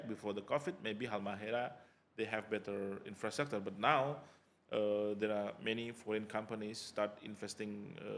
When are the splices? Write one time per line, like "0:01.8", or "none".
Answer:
none